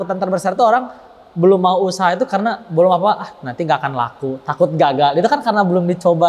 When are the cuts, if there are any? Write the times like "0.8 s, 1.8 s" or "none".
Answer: none